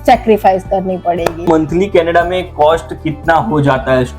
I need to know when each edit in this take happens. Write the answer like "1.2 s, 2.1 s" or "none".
1.4 s